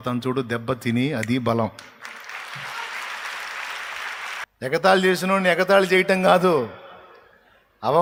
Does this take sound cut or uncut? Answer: uncut